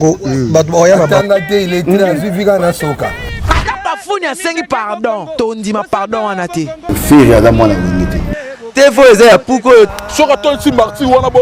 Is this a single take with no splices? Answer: yes; 0 cuts

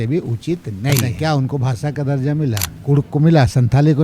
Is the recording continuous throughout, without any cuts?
no; 2 cuts; at 1.1 s, 2.7 s

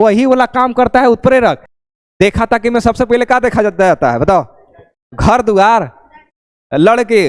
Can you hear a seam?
yes; 1 cut; at 1.7 s

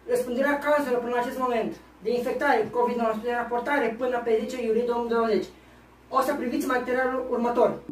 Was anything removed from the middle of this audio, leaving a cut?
no; 0 cuts

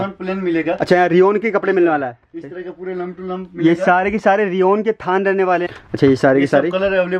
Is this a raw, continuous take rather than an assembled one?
no; 1 cut; at 5.7 s

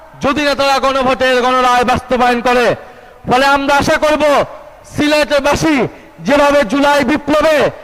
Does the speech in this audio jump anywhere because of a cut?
no; 0 cuts

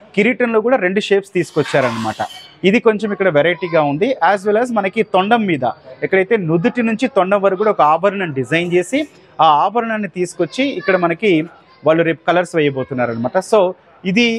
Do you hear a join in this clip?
no; 0 cuts

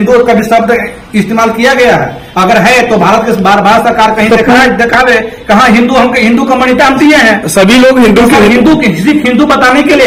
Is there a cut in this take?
no; 0 cuts

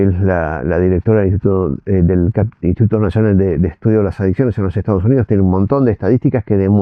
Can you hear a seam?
no; 0 cuts

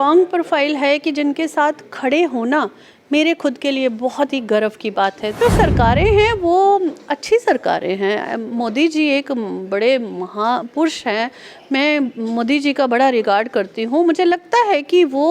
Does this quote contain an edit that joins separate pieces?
yes; 1 cut; at 5.4 s

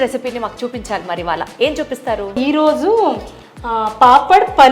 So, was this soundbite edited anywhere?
yes; 1 cut; at 2.4 s

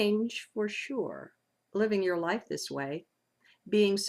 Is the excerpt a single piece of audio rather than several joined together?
no; 1 cut; at 2.7 s

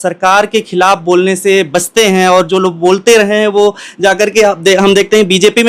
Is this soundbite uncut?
yes; 0 cuts

